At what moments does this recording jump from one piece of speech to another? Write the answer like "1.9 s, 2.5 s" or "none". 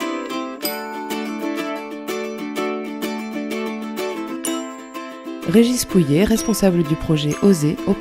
none